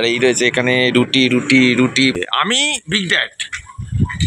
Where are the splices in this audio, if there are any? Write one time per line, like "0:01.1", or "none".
0:02.2